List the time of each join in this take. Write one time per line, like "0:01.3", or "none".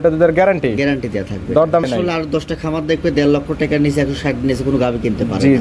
0:01.9